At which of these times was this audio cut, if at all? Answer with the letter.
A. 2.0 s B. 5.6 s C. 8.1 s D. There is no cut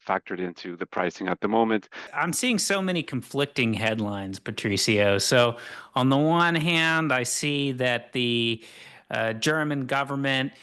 A